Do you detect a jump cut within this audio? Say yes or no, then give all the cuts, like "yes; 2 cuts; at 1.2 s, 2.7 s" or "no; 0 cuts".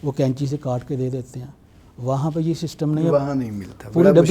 no; 0 cuts